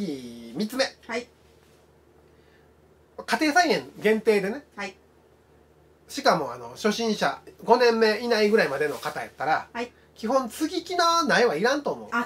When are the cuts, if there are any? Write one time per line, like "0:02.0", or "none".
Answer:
none